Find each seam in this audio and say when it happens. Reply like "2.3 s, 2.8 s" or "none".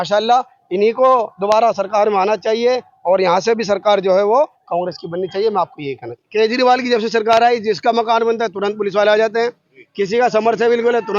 6.2 s